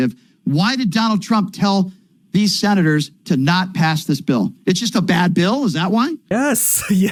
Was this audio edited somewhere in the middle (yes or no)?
no